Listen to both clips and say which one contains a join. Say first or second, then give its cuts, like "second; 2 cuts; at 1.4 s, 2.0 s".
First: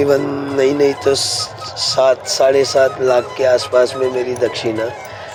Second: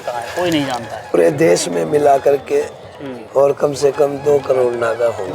second; 1 cut; at 1.1 s